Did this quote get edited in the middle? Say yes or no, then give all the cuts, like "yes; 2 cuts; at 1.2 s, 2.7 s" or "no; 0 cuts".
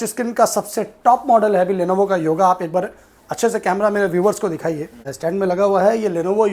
yes; 1 cut; at 5.0 s